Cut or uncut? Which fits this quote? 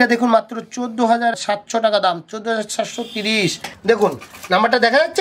cut